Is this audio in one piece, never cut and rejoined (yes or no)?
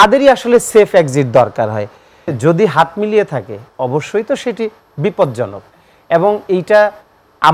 no